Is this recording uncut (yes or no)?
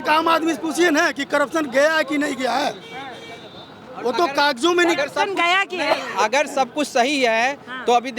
yes